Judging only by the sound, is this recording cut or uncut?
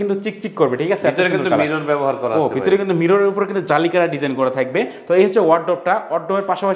uncut